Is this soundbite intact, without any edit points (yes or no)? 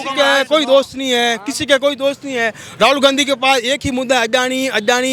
yes